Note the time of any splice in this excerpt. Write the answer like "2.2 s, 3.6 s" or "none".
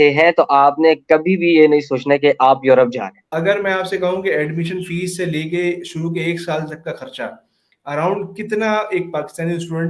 3.2 s